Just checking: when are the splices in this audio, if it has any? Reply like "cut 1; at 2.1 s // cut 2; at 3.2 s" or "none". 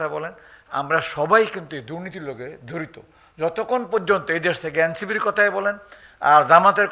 none